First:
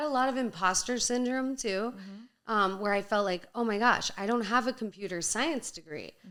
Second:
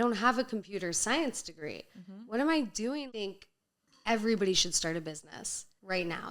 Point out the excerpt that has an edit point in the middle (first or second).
second